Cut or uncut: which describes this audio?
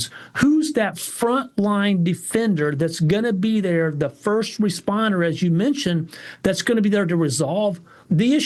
uncut